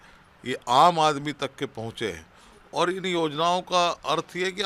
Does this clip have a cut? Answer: no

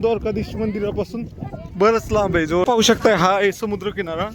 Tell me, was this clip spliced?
yes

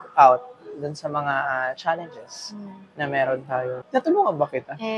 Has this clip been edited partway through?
yes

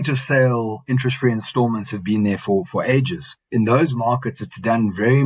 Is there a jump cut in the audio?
yes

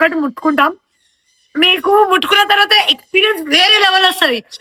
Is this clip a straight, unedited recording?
yes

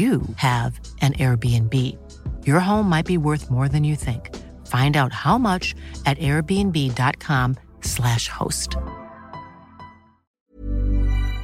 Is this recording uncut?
no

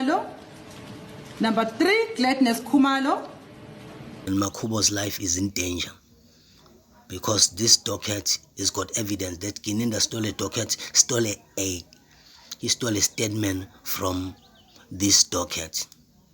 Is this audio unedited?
no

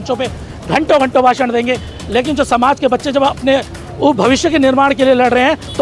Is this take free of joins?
yes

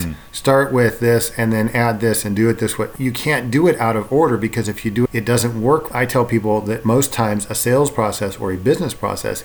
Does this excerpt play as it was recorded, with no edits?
no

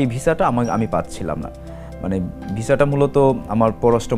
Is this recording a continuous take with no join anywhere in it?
yes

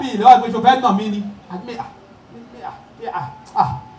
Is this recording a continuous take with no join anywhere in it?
yes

